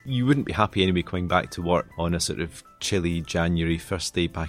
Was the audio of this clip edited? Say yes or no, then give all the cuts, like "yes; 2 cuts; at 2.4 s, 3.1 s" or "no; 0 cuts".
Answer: yes; 1 cut; at 1.9 s